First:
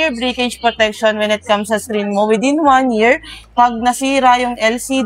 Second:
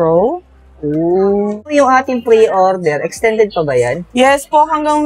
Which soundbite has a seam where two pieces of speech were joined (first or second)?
second